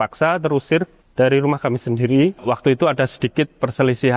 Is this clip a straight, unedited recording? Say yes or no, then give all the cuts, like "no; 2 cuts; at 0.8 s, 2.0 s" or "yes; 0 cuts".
no; 2 cuts; at 1.0 s, 2.4 s